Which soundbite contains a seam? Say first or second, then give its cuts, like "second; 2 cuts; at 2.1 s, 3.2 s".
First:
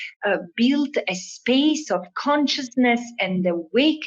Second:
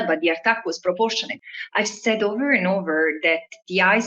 second; 1 cut; at 1.3 s